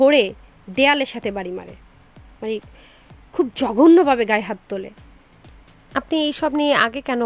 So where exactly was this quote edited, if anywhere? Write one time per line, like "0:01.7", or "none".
none